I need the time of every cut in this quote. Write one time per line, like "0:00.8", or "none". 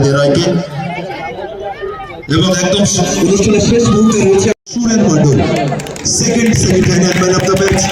0:04.7